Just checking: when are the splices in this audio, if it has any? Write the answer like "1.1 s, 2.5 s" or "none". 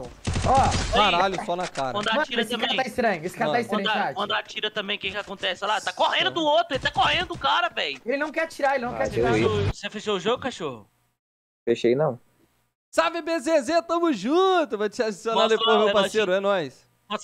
9.1 s